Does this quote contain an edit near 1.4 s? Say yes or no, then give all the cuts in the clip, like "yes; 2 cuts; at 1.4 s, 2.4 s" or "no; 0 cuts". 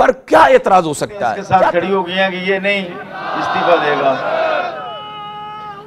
yes; 1 cut; at 1.4 s